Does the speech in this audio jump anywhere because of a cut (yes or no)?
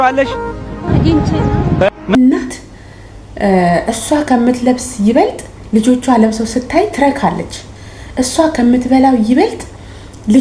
yes